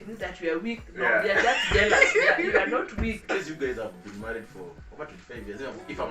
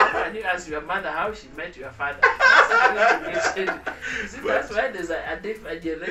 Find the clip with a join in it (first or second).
first